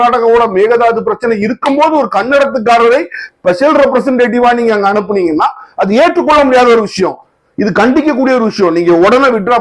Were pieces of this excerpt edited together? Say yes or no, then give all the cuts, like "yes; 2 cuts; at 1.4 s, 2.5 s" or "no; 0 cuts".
no; 0 cuts